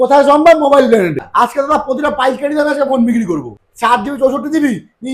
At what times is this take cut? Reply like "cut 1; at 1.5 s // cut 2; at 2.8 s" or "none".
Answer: cut 1; at 1.2 s // cut 2; at 3.6 s

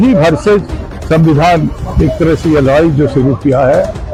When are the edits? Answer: none

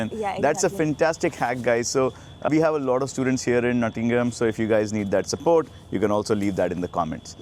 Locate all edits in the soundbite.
none

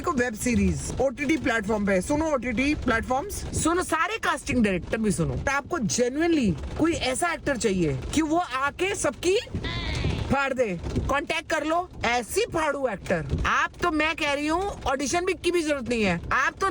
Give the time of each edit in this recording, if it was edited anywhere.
cut 1; at 3.4 s // cut 2; at 5.5 s // cut 3; at 10.9 s // cut 4; at 13.3 s

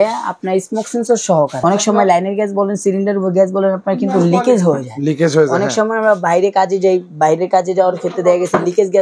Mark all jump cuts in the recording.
cut 1; at 1.5 s

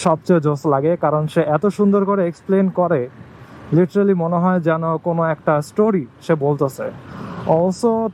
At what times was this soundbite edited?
none

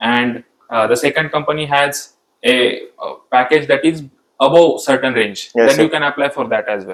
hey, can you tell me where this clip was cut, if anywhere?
none

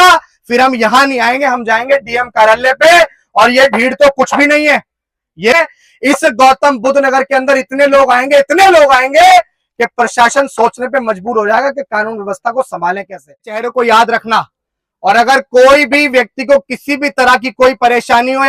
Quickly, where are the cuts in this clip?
cut 1; at 5.5 s // cut 2; at 13.6 s

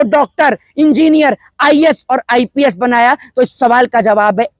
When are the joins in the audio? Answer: none

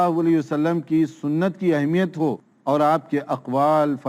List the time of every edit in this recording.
cut 1; at 2.5 s

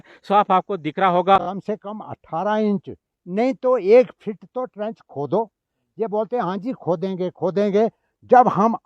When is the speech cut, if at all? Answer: cut 1; at 1.4 s

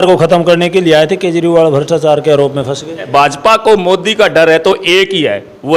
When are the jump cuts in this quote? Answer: cut 1; at 3.1 s

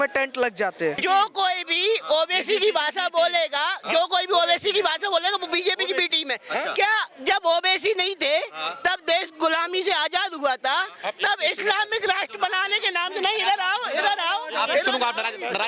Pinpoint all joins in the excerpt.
cut 1; at 1.0 s

